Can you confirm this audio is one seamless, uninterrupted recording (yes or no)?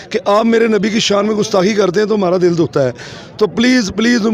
yes